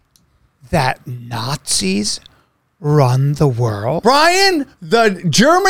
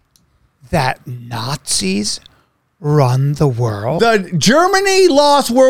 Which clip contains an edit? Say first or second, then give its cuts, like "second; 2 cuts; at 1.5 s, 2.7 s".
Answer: second; 1 cut; at 4.0 s